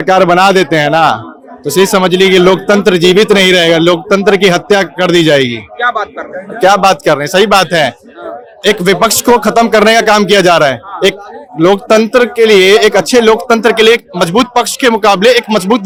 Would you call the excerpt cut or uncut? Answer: uncut